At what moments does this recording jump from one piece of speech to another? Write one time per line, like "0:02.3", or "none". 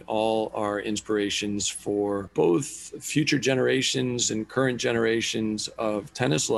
0:02.3